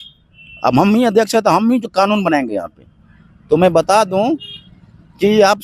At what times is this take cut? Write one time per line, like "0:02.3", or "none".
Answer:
none

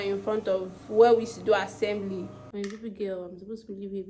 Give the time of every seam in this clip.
0:02.4

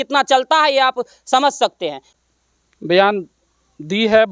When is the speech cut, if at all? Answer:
0:02.1

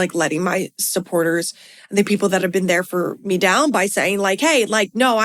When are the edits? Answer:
none

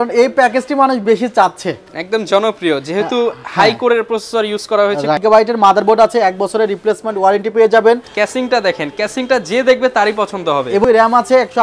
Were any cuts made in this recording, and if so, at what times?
0:05.2
0:08.1
0:10.8

